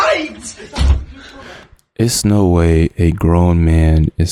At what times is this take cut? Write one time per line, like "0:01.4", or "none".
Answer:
none